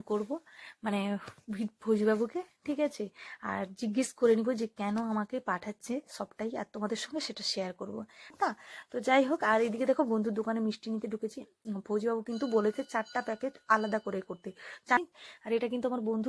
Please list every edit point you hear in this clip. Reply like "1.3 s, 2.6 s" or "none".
8.3 s, 15.0 s